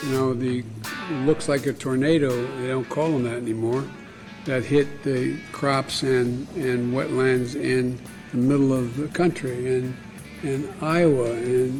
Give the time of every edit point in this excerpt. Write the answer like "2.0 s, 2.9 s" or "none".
none